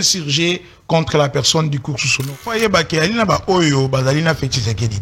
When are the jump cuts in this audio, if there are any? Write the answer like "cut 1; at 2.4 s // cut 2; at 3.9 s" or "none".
cut 1; at 2.4 s